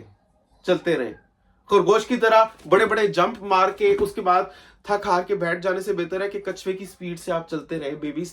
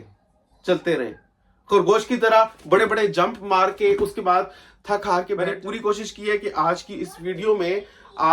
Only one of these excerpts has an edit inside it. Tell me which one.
second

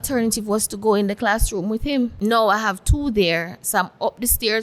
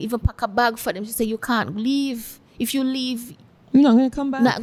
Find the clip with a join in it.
first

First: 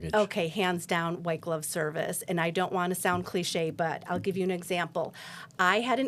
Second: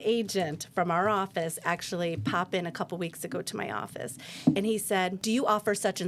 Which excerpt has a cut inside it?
second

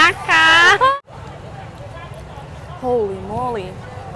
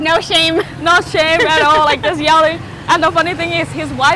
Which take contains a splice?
first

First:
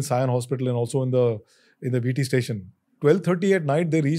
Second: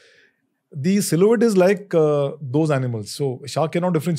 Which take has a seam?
first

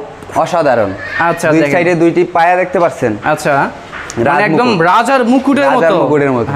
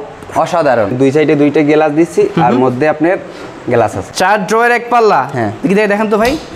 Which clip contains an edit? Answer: second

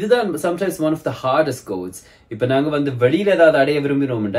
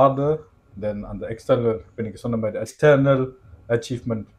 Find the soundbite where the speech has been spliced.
second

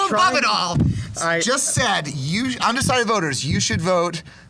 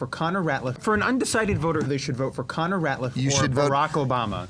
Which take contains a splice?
second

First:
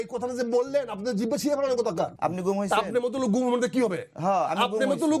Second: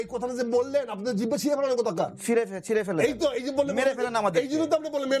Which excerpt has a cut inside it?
first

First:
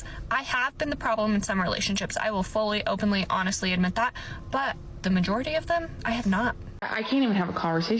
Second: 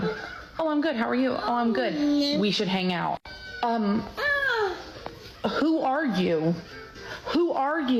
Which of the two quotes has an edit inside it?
first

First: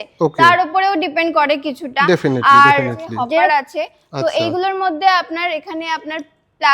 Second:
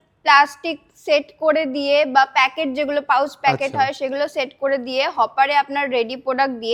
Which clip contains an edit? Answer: first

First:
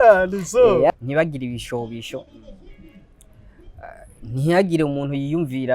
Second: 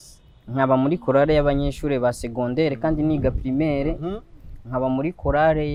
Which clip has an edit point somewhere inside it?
first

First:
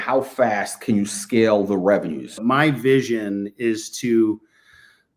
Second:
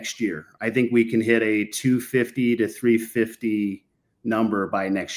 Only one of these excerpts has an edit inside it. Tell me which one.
first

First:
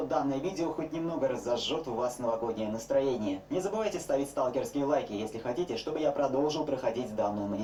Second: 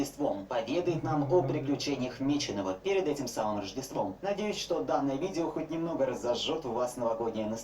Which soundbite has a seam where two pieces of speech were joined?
second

